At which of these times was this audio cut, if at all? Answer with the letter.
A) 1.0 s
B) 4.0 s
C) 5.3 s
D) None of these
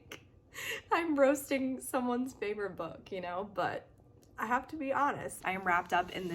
C